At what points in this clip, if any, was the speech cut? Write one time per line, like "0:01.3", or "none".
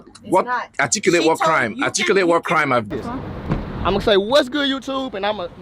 0:02.9